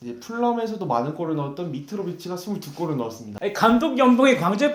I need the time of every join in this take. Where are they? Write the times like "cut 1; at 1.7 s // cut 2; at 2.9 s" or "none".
cut 1; at 3.3 s